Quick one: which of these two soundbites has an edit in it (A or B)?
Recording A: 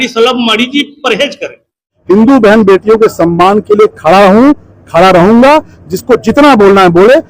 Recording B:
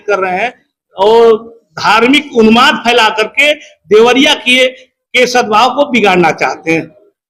A